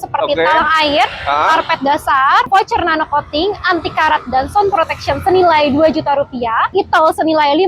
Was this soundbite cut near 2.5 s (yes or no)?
yes